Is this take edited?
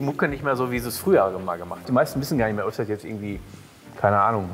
yes; 1 cut; at 1.8 s

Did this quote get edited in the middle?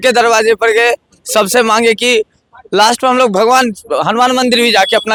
no; 0 cuts

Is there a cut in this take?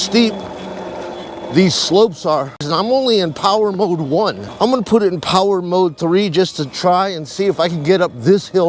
yes; 2 cuts; at 2.7 s, 4.4 s

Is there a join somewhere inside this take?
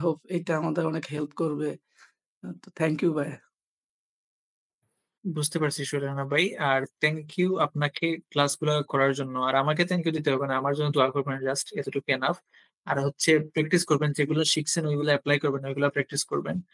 no; 0 cuts

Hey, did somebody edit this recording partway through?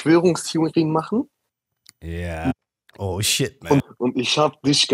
yes; 1 cut; at 3.9 s

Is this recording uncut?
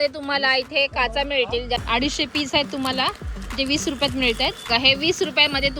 no; 1 cut; at 1.8 s

